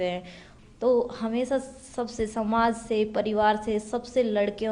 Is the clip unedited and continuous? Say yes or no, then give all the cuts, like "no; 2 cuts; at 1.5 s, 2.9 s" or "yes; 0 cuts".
yes; 0 cuts